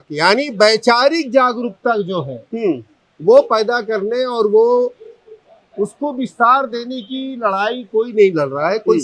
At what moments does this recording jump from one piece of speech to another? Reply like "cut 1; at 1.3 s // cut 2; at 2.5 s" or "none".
none